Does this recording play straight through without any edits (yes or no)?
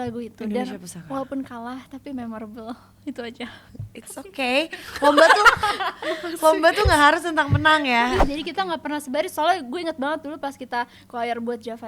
no